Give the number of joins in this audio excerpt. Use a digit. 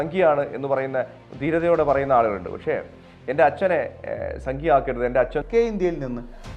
1